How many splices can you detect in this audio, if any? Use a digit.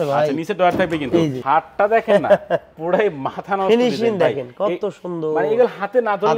1